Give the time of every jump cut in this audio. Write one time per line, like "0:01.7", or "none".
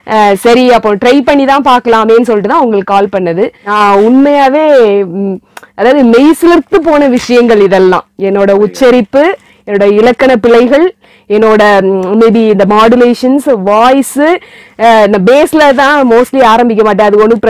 0:03.6